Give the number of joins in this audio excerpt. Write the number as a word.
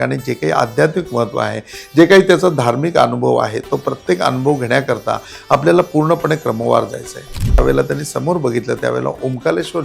one